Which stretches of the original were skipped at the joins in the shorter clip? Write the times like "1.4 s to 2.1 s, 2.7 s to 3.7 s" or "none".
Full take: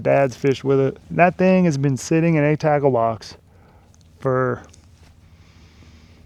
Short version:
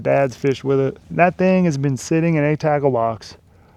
none